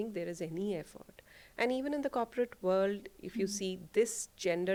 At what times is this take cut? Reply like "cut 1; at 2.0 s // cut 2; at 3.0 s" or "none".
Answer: none